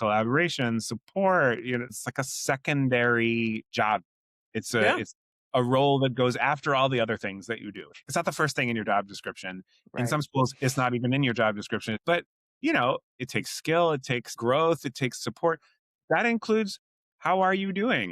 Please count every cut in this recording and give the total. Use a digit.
5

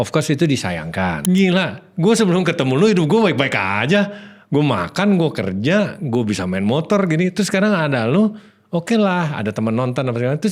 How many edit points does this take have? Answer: 1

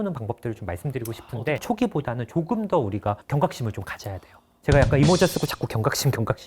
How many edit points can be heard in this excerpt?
2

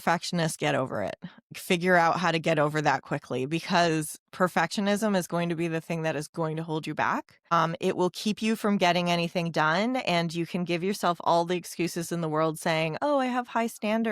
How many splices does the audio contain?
2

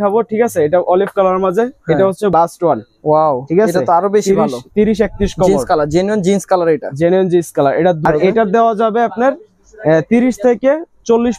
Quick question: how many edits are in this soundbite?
2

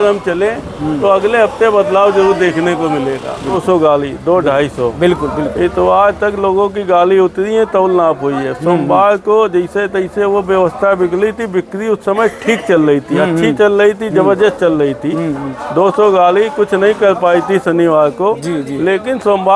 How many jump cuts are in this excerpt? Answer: 1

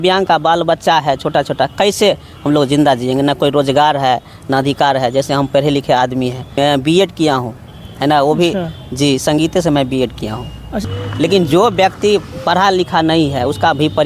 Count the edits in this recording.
2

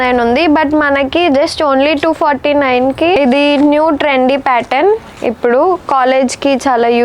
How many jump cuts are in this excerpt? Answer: 0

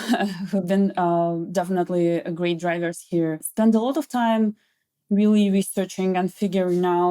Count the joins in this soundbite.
1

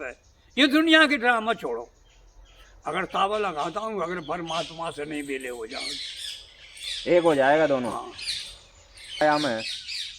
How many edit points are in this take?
1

